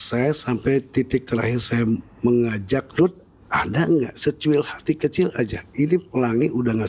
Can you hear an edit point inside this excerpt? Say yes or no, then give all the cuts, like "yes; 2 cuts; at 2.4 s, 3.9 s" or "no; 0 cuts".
yes; 1 cut; at 2.9 s